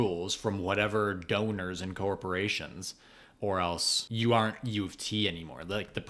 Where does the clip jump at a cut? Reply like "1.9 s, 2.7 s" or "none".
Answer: 3.9 s